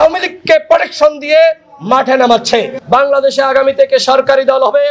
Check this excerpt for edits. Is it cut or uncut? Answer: cut